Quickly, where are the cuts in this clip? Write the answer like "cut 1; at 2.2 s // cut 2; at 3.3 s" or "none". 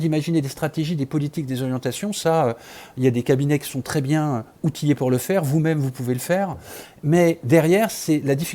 none